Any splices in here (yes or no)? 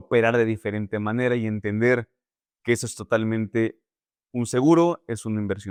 no